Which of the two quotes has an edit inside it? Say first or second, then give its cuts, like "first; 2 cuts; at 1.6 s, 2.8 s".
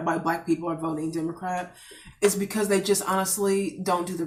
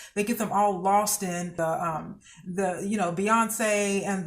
second; 1 cut; at 1.5 s